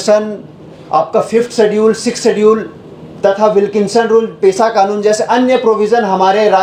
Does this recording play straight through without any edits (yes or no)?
yes